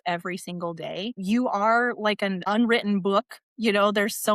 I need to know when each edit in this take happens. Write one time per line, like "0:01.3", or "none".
0:01.2
0:02.4

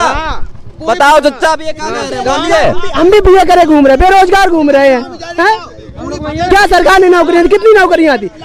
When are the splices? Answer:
none

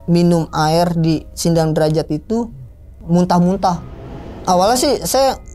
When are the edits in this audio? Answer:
none

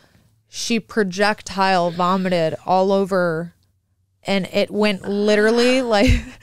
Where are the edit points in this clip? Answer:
none

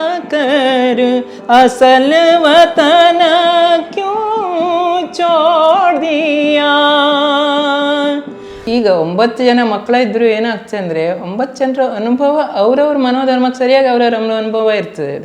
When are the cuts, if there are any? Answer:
0:08.6

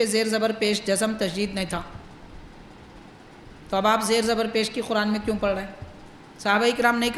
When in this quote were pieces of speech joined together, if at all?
none

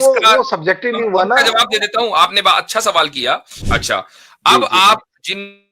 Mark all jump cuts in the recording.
0:03.6

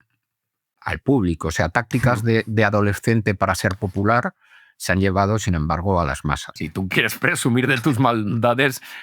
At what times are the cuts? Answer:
0:06.5

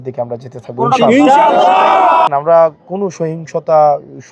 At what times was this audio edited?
0:02.3

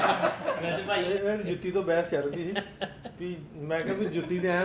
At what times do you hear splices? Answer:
0:01.0

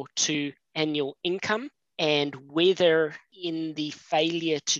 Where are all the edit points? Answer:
0:01.8
0:03.3

